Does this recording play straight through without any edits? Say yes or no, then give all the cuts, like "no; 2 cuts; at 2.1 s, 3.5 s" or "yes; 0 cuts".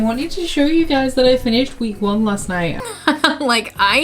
no; 1 cut; at 2.8 s